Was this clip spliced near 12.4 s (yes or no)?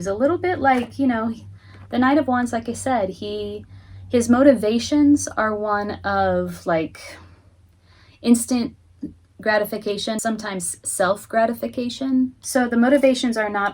yes